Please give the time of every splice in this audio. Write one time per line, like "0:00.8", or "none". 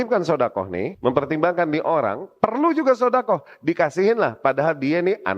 0:00.9